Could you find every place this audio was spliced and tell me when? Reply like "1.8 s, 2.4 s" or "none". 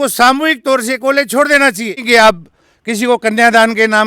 2.0 s